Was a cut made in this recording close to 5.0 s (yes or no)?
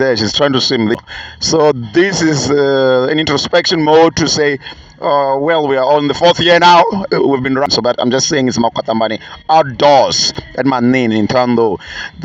no